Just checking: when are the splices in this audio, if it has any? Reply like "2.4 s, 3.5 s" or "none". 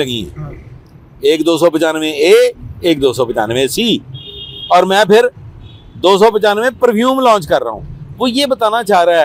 none